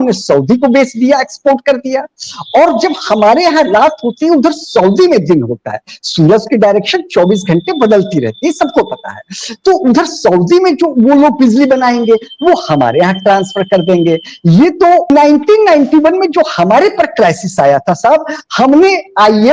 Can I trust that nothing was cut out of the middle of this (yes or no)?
no